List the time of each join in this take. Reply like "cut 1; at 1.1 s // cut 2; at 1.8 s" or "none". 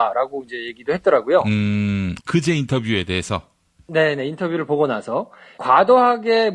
cut 1; at 2.7 s